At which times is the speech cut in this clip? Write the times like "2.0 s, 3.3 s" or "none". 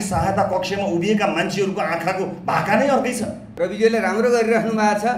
3.4 s

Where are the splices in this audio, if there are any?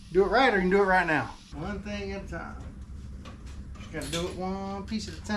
1.4 s

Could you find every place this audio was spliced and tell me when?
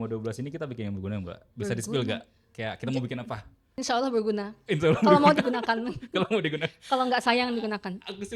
3.7 s

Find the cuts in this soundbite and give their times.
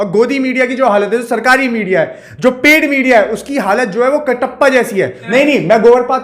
5.0 s

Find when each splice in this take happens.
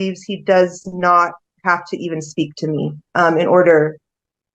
none

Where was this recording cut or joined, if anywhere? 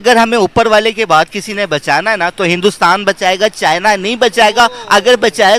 none

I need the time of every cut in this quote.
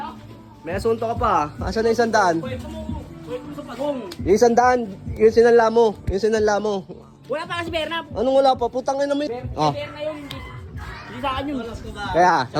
none

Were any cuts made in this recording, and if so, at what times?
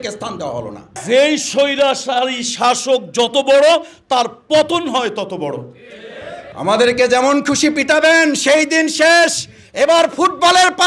1.0 s, 6.5 s

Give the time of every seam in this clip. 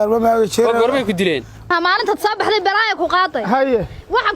1.7 s

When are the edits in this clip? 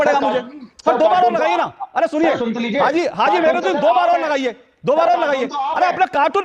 none

